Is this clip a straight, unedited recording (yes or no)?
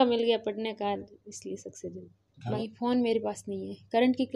no